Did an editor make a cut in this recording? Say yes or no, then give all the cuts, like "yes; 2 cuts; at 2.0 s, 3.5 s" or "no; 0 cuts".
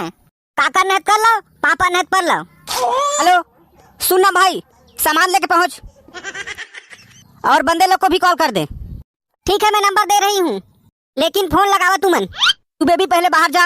yes; 2 cuts; at 3.2 s, 9.2 s